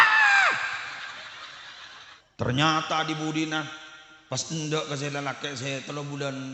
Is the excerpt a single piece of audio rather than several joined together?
no; 1 cut; at 2.1 s

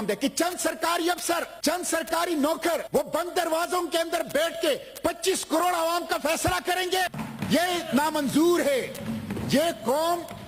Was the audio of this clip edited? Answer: yes; 3 cuts; at 1.5 s, 2.8 s, 7.2 s

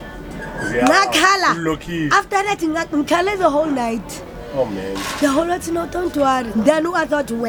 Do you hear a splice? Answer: no; 0 cuts

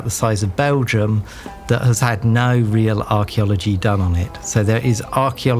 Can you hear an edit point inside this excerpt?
no; 0 cuts

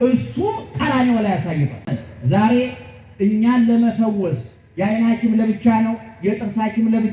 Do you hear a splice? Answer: yes; 1 cut; at 1.9 s

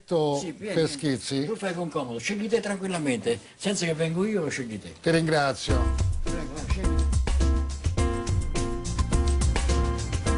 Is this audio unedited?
no; 1 cut; at 7.4 s

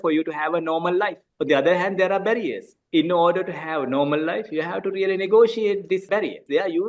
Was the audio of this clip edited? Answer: yes; 3 cuts; at 1.3 s, 2.8 s, 6.2 s

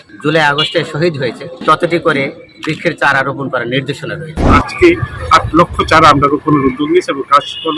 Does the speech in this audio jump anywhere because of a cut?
yes; 2 cuts; at 1.6 s, 4.4 s

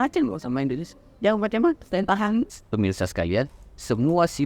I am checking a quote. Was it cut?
yes; 1 cut; at 2.5 s

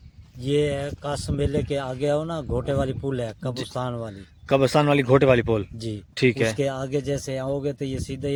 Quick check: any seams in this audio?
no; 0 cuts

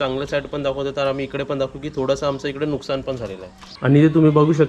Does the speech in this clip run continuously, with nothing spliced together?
no; 1 cut; at 3.6 s

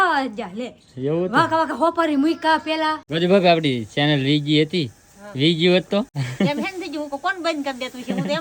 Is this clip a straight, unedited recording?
no; 2 cuts; at 3.0 s, 6.2 s

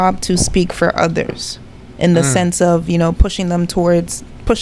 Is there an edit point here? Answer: no; 0 cuts

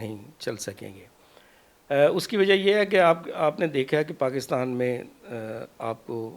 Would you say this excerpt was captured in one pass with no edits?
yes; 0 cuts

